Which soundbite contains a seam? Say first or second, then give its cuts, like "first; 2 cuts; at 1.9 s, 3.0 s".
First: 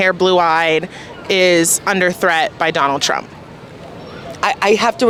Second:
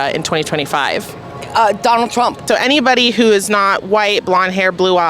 second; 1 cut; at 2.4 s